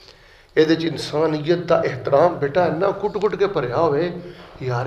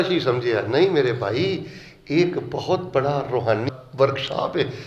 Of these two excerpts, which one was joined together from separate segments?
second; 1 cut; at 3.7 s

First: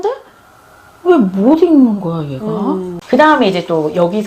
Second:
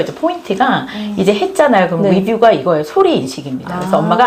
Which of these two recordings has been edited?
first; 1 cut; at 2.9 s

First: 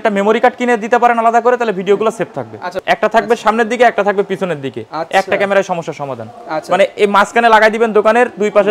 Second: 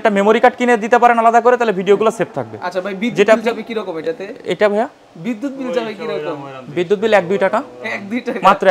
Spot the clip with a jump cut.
first; 1 cut; at 2.8 s

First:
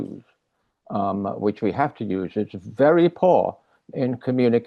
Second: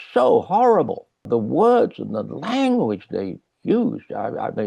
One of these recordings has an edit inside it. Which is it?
second; 1 cut; at 1.2 s

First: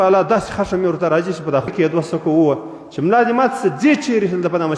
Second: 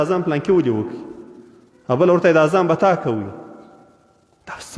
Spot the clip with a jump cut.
first; 1 cut; at 1.7 s

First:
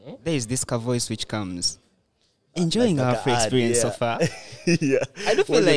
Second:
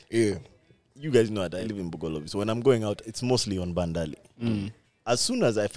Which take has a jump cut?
second; 2 cuts; at 1.7 s, 4.9 s

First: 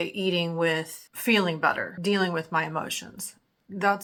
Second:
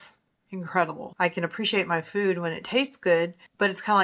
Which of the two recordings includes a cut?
second; 1 cut; at 1.0 s

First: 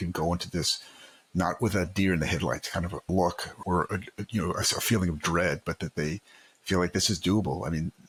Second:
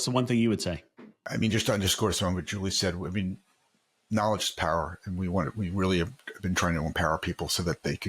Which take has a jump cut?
second; 1 cut; at 1.3 s

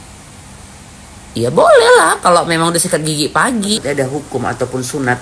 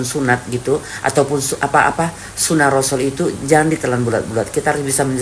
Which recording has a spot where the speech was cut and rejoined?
first; 1 cut; at 3.8 s

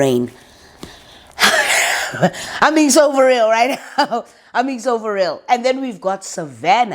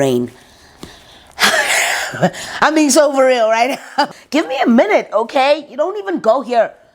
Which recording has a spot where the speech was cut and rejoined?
second; 1 cut; at 4.2 s

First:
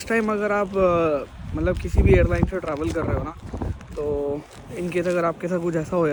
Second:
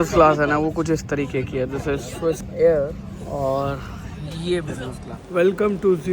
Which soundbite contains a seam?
second; 2 cuts; at 2.5 s, 5.1 s

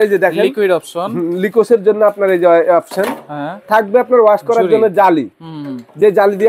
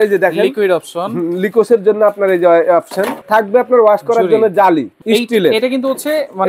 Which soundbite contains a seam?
second; 2 cuts; at 3.2 s, 4.9 s

